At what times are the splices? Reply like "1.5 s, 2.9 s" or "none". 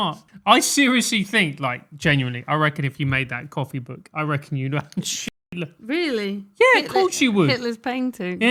none